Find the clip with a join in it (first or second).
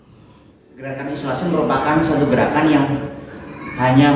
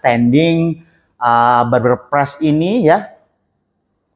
first